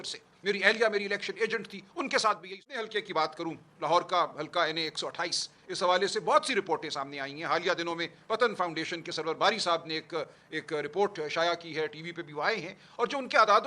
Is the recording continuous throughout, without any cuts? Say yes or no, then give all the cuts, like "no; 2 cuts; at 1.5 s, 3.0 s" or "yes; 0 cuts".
no; 1 cut; at 2.9 s